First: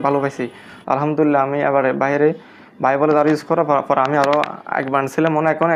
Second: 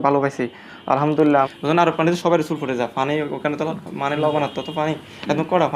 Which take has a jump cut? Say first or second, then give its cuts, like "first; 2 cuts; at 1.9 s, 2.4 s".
second; 1 cut; at 1.5 s